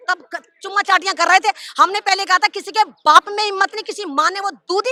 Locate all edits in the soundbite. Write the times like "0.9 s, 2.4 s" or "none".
none